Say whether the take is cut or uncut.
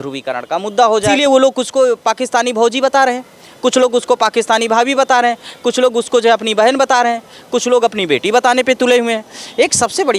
uncut